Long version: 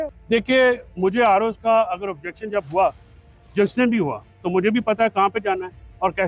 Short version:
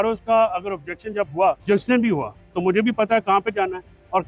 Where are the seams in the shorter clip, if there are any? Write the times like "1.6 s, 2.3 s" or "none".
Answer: 1.6 s